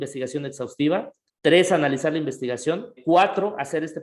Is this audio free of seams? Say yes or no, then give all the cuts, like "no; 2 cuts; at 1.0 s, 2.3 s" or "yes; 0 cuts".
no; 2 cuts; at 1.2 s, 3.0 s